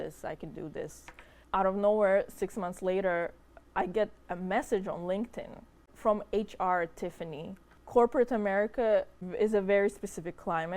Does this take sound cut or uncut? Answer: cut